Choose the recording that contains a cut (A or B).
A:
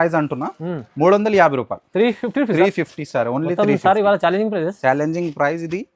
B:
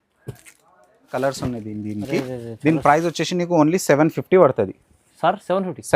B